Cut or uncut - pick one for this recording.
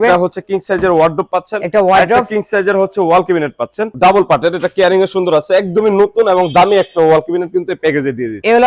uncut